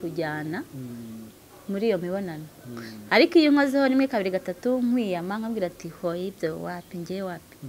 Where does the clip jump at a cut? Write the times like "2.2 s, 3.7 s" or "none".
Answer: none